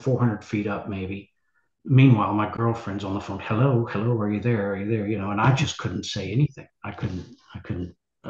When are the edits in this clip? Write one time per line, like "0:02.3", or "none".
0:01.7